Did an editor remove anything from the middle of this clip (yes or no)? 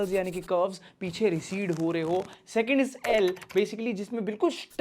no